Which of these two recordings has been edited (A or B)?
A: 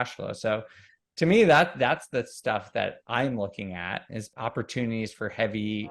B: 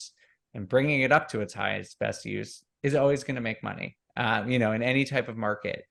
A